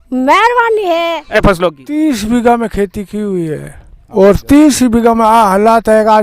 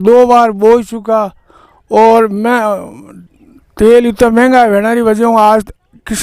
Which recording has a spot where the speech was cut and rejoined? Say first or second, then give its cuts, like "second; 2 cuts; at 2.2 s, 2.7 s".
first; 1 cut; at 1.4 s